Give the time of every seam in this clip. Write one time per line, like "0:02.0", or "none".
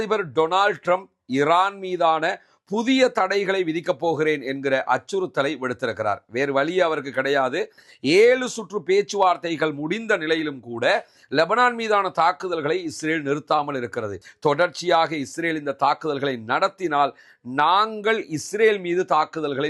0:07.8
0:14.2